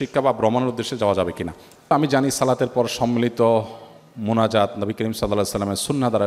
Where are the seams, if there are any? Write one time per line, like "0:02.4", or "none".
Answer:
0:01.9